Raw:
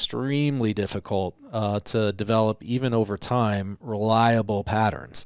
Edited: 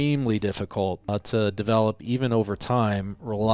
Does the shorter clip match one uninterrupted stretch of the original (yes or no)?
no